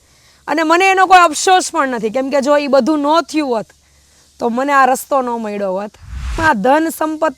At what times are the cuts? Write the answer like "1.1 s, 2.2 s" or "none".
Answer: 6.3 s